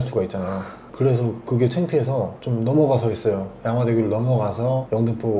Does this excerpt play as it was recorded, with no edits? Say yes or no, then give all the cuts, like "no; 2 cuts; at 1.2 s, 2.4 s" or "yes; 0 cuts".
yes; 0 cuts